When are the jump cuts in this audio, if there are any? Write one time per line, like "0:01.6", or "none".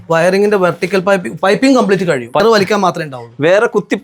0:02.4

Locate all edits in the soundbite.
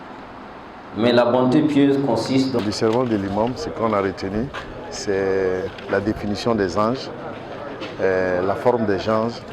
0:02.6

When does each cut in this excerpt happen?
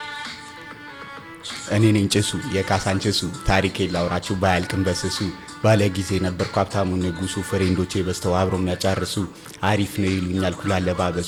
none

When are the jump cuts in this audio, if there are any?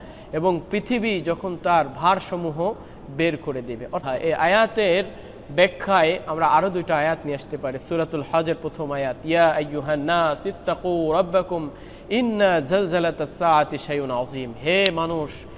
0:04.0

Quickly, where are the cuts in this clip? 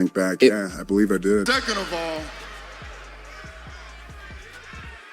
0:01.4

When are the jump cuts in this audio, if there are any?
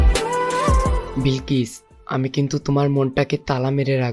0:01.1

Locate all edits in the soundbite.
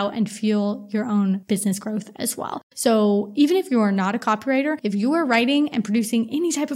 0:01.4
0:02.7
0:04.8

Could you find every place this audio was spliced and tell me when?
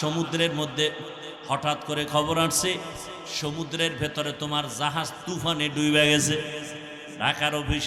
0:01.0

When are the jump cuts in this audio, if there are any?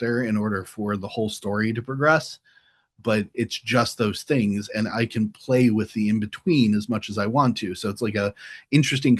none

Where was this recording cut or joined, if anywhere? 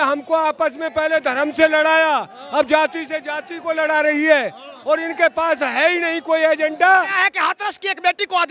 0:07.2

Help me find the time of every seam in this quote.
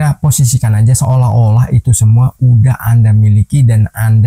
none

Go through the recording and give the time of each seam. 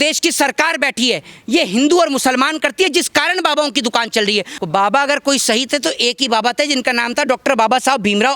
0:04.6

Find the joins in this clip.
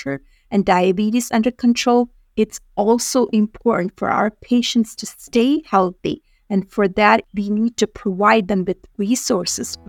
0:07.2

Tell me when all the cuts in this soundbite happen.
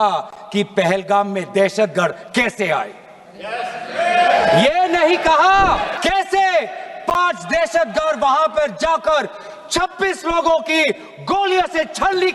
0:05.9

